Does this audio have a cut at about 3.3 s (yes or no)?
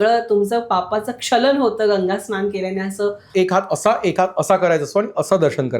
yes